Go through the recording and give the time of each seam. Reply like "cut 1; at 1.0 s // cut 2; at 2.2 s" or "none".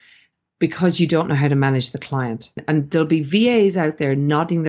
cut 1; at 2.6 s

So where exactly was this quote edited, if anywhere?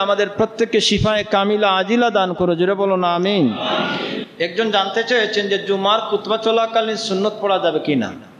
cut 1; at 4.2 s

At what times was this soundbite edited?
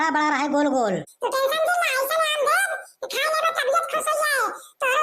cut 1; at 1.1 s

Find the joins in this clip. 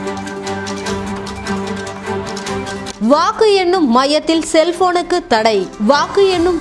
cut 1; at 2.5 s

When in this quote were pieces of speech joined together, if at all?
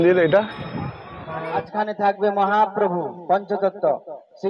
cut 1; at 1.6 s

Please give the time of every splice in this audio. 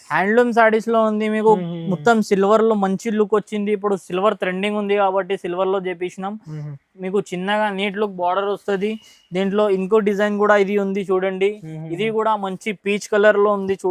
none

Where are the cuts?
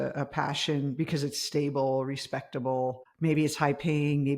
cut 1; at 3.1 s

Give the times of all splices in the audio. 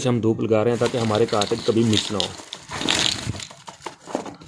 none

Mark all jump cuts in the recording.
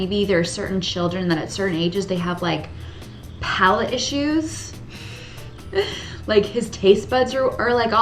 none

